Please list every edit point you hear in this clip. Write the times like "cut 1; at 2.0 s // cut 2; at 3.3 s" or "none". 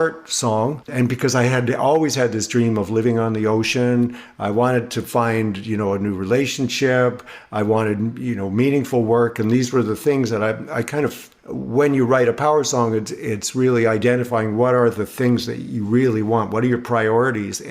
cut 1; at 0.9 s

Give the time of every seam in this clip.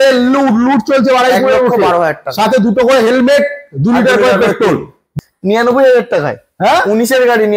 cut 1; at 5.1 s

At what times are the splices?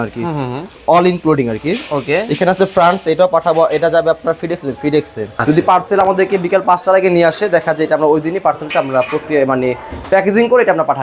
cut 1; at 5.3 s

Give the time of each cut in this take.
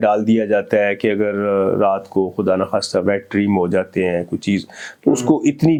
none

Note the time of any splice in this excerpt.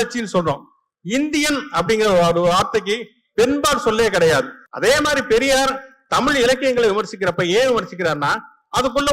cut 1; at 4.6 s

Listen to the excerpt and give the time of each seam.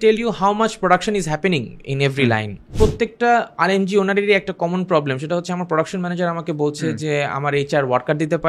cut 1; at 2.7 s

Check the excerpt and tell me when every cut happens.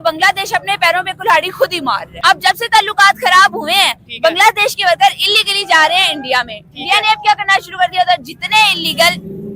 cut 1; at 2.1 s

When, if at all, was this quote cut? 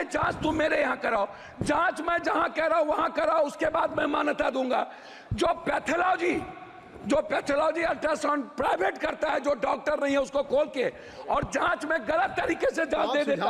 none

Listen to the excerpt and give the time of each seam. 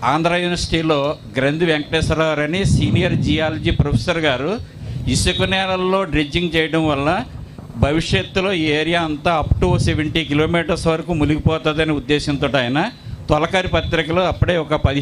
none

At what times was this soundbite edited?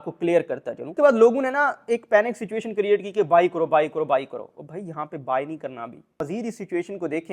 cut 1; at 0.9 s // cut 2; at 6.2 s

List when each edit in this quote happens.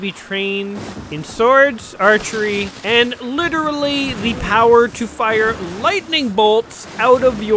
cut 1; at 0.9 s // cut 2; at 2.7 s

